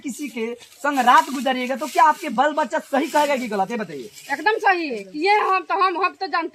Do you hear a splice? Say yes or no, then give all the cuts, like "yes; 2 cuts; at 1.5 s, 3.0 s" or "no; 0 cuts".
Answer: no; 0 cuts